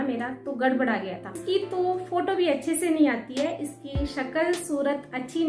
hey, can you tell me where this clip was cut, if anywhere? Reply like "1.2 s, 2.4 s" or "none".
1.3 s

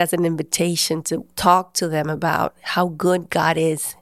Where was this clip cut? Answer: 1.3 s

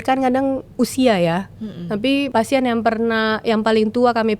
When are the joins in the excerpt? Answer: 2.3 s

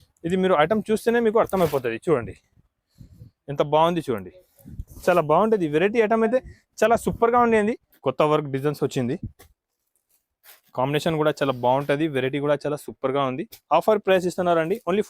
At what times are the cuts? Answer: 7.9 s

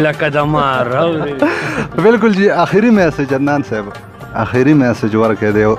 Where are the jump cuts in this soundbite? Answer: none

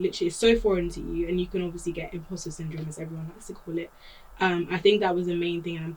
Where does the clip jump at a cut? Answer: none

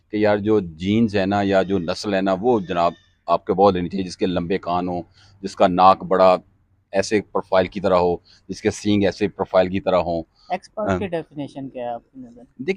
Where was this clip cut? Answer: none

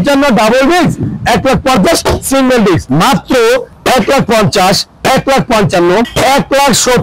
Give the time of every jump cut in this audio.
2.9 s, 6.1 s

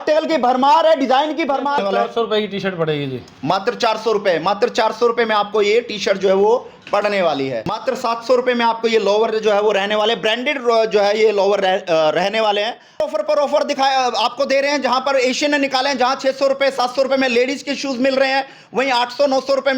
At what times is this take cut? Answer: 1.8 s, 7.8 s, 13.0 s

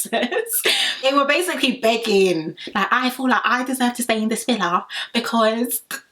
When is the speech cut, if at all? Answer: 1.0 s

